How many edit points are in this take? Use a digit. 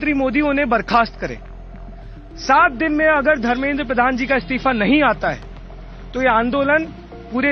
0